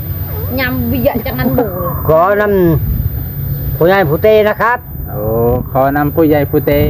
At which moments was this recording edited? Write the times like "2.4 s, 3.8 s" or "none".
none